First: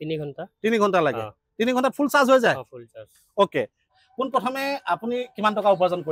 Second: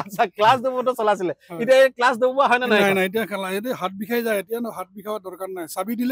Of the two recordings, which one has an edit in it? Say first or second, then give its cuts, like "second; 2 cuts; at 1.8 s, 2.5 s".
first; 1 cut; at 3.9 s